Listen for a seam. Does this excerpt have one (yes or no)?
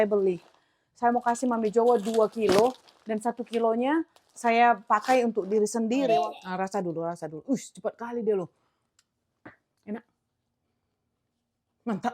yes